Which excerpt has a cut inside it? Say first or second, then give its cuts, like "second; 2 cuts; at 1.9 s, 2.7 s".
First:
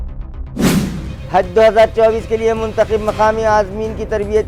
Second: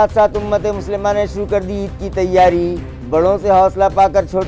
first; 1 cut; at 1.0 s